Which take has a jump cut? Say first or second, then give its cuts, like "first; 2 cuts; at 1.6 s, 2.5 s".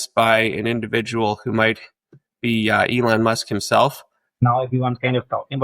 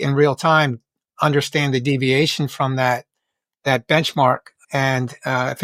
first; 1 cut; at 4.4 s